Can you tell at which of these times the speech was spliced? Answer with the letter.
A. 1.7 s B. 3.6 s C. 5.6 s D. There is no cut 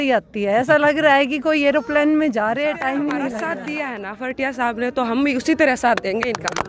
B